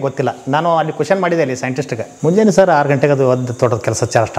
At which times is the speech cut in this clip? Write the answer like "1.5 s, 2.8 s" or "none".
2.0 s